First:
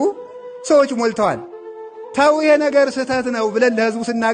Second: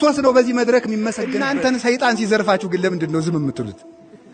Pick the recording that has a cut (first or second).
second